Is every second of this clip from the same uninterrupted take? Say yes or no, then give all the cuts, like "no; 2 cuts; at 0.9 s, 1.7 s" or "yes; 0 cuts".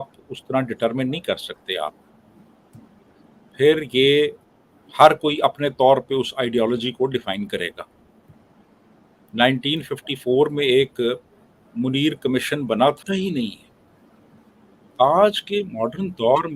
no; 1 cut; at 13.0 s